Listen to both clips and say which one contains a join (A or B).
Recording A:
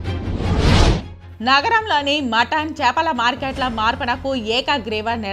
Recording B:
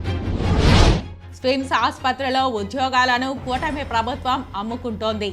B